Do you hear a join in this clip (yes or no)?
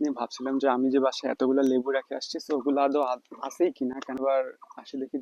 yes